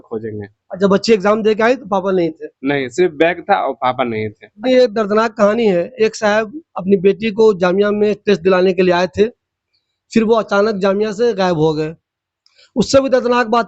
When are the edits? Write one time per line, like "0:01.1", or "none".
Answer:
0:04.6